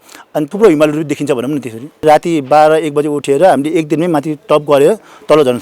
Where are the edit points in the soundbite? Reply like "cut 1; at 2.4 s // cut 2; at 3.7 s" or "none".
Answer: cut 1; at 2.0 s